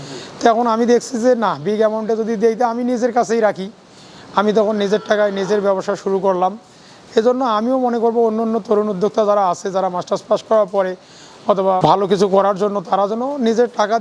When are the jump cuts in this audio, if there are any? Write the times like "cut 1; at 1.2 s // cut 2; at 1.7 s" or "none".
none